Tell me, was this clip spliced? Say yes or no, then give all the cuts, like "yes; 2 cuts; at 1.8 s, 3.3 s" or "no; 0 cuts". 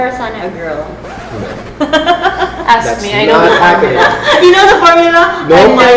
no; 0 cuts